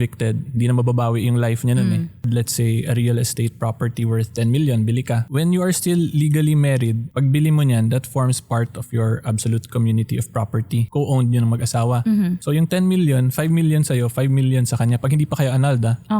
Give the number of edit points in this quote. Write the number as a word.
four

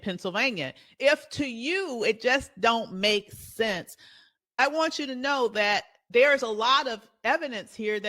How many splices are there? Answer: two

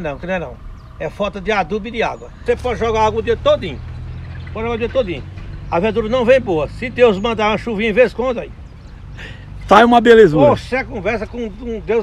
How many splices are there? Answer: one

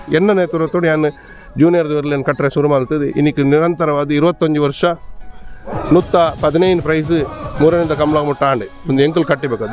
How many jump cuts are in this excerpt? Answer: zero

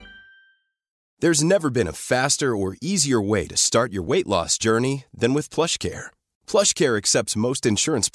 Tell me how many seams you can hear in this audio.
one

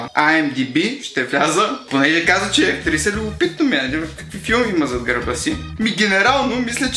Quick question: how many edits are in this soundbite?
one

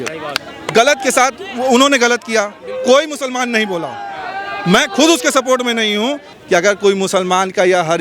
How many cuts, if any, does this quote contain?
one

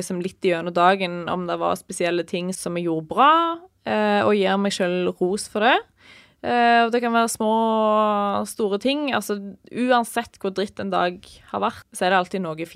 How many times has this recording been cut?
one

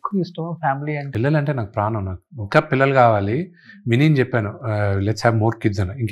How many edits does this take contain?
one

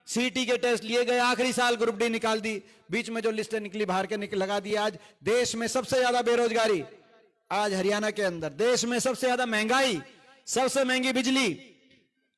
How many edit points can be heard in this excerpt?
zero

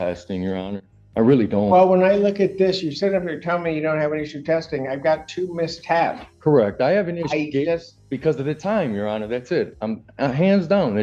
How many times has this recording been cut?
zero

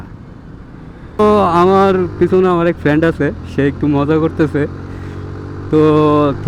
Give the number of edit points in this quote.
one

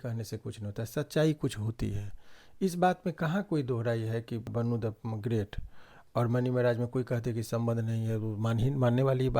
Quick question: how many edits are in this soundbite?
one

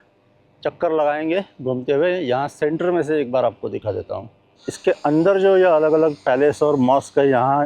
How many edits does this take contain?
one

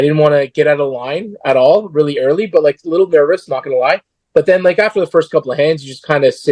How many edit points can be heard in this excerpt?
zero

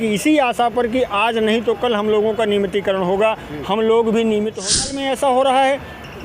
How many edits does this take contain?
one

